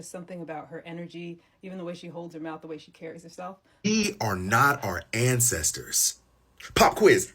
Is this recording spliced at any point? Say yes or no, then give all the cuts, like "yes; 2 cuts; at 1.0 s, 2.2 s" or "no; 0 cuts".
yes; 1 cut; at 3.7 s